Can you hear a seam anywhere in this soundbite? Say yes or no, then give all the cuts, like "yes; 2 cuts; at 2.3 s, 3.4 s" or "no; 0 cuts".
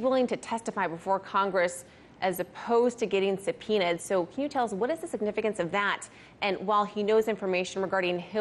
yes; 1 cut; at 2.1 s